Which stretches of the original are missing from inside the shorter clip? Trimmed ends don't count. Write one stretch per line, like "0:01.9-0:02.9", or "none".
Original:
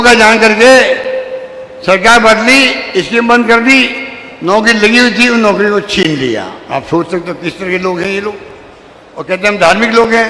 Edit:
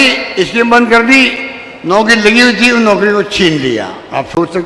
none